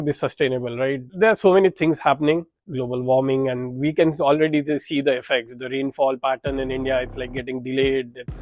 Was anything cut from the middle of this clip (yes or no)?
yes